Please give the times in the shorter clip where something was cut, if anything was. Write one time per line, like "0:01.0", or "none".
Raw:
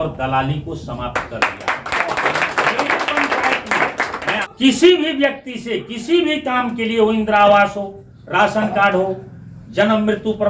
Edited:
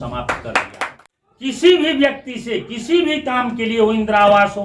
0:01.0